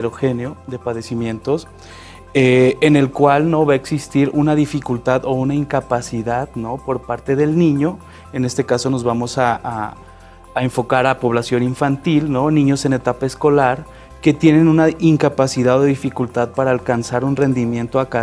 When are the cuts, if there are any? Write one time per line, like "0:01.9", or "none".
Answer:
0:05.9